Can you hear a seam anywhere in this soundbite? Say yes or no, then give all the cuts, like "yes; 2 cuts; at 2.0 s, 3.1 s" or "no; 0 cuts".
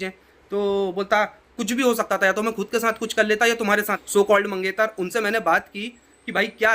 yes; 1 cut; at 4.0 s